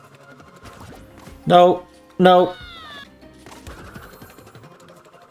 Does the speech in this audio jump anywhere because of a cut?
yes; 1 cut; at 3.1 s

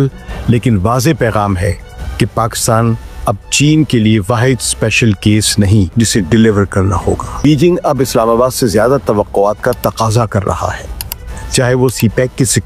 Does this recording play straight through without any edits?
no; 2 cuts; at 5.9 s, 7.4 s

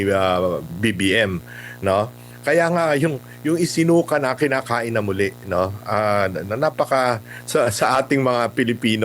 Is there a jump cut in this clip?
yes; 1 cut; at 2.3 s

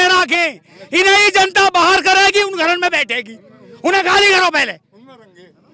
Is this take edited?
no; 0 cuts

